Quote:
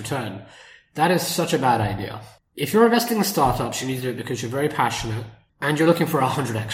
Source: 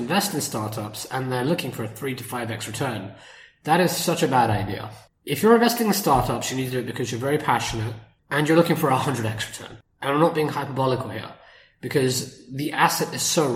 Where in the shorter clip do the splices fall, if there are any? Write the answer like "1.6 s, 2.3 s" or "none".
none